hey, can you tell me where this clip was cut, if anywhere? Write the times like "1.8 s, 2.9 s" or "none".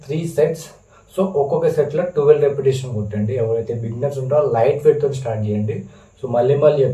none